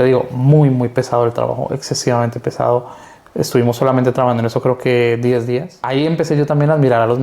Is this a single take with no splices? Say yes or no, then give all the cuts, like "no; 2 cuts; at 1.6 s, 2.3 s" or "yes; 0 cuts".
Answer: no; 1 cut; at 5.7 s